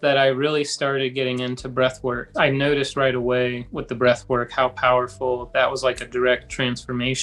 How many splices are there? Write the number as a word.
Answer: one